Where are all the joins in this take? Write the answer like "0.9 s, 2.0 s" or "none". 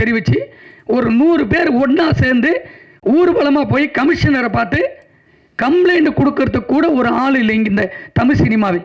none